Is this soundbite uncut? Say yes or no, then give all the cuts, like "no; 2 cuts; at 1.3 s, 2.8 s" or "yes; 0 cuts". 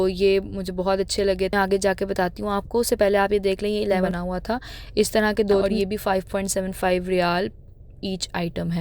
no; 3 cuts; at 1.5 s, 4.1 s, 5.7 s